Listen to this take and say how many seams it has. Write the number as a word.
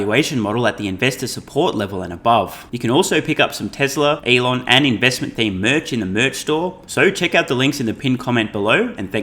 three